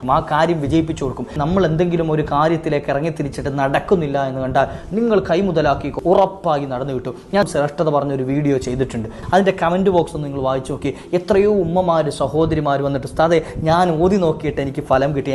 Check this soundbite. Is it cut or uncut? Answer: cut